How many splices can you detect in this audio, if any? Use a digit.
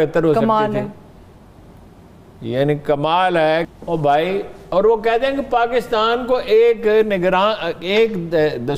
0